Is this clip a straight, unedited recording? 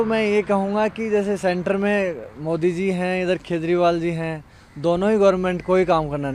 yes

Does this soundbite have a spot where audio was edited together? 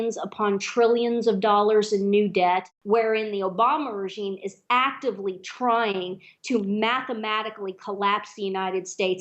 yes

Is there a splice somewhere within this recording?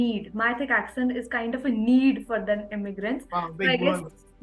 no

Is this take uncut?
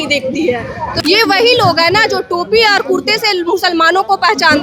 no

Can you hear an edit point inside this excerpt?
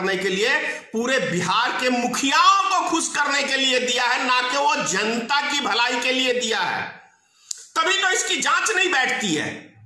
no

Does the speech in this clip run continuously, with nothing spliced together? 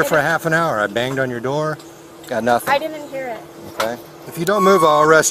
no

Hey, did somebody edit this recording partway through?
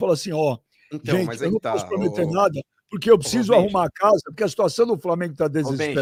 no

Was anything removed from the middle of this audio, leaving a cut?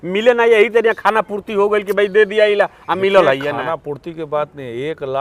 no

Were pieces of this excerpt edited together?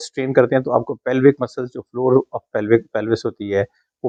no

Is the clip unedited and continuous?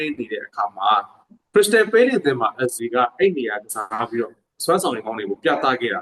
yes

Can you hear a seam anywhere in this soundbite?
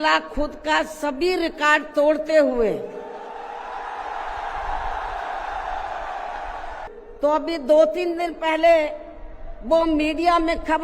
yes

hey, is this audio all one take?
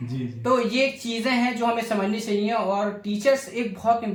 yes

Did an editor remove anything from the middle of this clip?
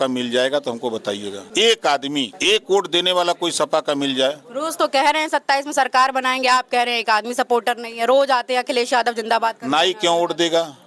yes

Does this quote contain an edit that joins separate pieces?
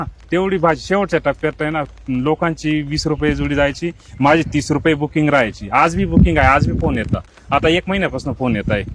no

